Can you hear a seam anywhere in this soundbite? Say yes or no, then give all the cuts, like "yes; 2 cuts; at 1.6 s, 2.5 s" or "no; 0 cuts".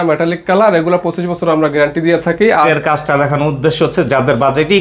yes; 1 cut; at 2.7 s